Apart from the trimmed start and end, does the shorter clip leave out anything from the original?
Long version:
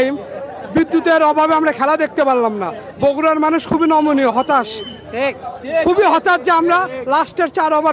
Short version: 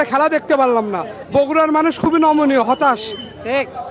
no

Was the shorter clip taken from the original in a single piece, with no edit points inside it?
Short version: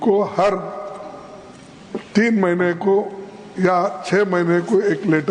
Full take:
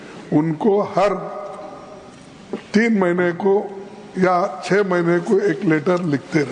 yes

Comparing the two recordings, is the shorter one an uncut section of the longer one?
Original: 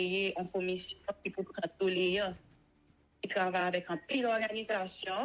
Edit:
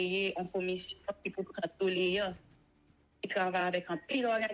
yes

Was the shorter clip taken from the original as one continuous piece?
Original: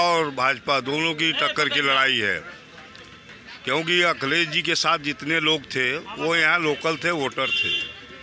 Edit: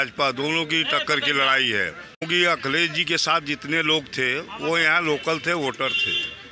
no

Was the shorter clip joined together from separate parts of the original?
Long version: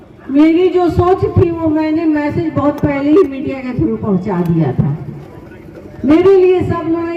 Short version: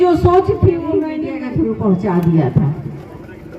yes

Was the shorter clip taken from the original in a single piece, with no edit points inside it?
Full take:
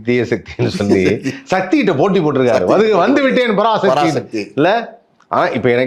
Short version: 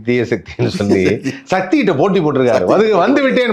yes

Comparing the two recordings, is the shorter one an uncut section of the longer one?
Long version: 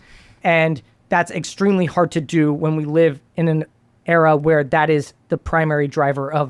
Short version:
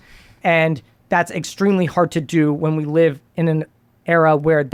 yes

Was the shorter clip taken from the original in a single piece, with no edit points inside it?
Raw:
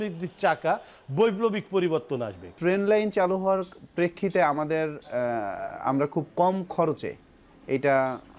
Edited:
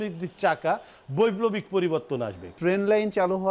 yes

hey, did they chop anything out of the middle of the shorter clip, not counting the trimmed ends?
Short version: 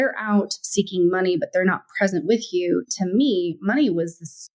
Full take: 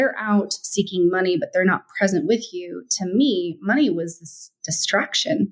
no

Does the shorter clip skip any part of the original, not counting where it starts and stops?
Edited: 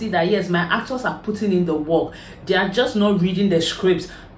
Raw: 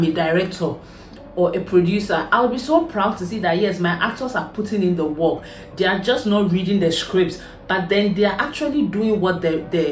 no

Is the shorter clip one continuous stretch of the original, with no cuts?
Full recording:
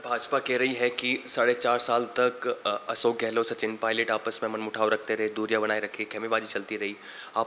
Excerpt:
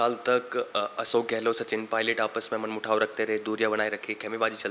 yes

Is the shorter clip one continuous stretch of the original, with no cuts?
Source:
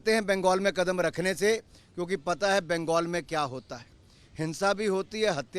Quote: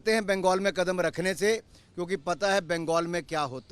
yes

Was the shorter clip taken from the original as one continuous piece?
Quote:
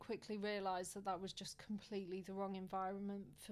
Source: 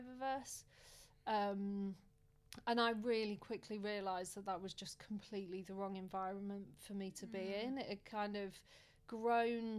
yes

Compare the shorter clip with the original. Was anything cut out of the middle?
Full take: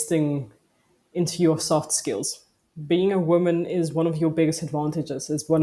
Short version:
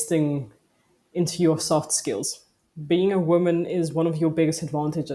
no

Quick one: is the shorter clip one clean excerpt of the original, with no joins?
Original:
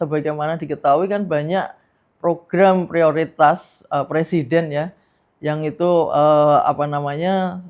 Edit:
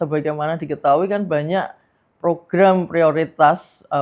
yes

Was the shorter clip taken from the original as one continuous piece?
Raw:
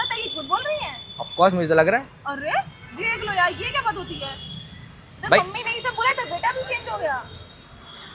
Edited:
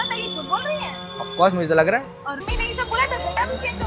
no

